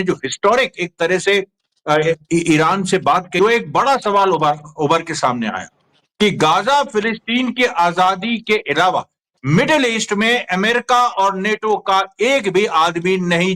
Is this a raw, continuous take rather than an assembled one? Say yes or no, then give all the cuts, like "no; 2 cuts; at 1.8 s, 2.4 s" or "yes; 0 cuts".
no; 1 cut; at 3.3 s